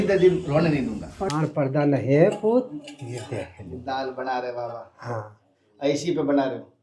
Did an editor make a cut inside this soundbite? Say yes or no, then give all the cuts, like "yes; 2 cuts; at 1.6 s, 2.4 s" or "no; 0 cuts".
yes; 1 cut; at 1.1 s